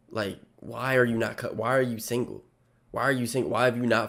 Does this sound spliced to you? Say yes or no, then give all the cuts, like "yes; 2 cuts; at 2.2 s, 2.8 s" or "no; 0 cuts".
no; 0 cuts